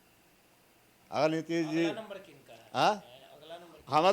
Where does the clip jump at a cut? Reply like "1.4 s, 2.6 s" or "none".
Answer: none